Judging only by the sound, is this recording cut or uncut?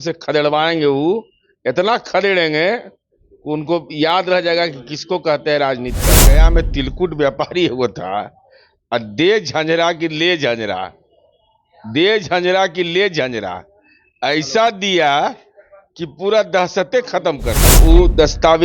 cut